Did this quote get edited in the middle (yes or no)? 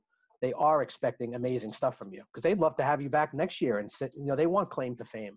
no